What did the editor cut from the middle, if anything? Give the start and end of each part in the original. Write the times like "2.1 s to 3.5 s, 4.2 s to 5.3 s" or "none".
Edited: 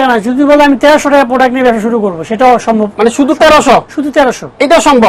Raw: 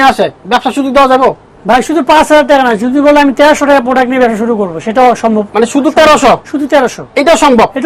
none